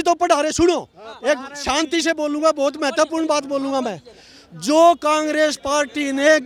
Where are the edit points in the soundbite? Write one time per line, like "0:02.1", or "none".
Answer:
none